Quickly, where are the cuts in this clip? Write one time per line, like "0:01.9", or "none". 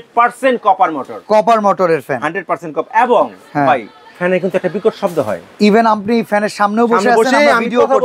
none